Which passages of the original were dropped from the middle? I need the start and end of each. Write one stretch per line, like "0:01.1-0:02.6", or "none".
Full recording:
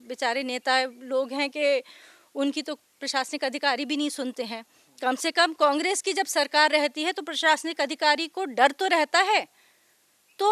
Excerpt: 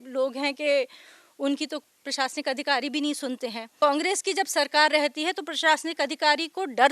0:04.7-0:05.5